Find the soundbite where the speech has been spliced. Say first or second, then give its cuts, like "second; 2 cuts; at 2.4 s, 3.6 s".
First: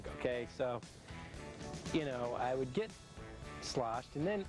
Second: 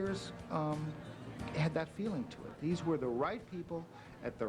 second; 1 cut; at 2.5 s